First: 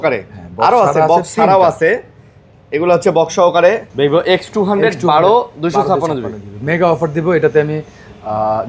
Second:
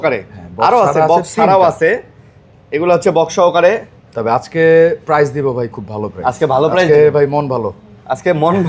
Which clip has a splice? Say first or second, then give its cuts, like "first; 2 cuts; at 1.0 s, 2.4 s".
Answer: first; 1 cut; at 3.9 s